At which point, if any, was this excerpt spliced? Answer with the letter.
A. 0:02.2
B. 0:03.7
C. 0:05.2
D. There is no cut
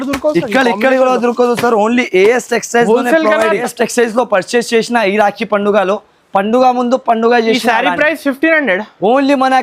B